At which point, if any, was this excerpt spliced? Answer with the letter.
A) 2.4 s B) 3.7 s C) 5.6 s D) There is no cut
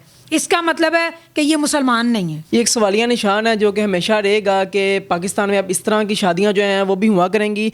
A